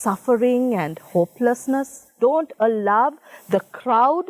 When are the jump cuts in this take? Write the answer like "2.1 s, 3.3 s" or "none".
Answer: 2.1 s